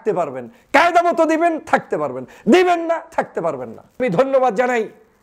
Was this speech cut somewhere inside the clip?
yes; 1 cut; at 4.0 s

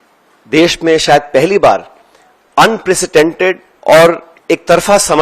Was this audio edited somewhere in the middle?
yes; 2 cuts; at 3.7 s, 4.3 s

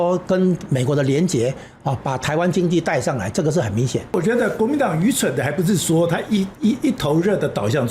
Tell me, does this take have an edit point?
yes; 1 cut; at 4.1 s

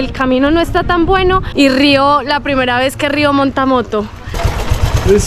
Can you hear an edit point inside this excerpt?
yes; 2 cuts; at 1.5 s, 4.4 s

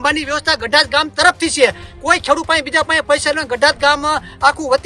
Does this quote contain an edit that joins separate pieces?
no; 0 cuts

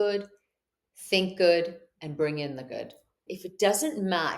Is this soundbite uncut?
no; 1 cut; at 3.3 s

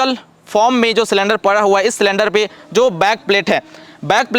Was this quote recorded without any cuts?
yes; 0 cuts

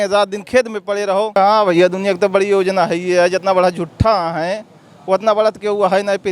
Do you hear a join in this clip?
yes; 1 cut; at 1.4 s

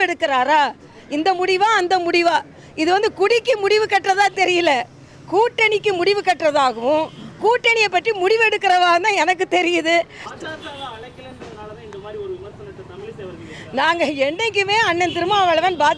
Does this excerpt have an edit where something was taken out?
yes; 1 cut; at 10.2 s

